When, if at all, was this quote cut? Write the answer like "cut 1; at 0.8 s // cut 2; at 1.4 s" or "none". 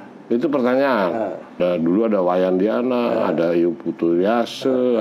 cut 1; at 1.6 s